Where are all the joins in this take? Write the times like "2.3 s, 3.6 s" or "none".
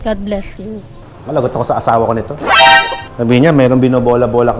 1.2 s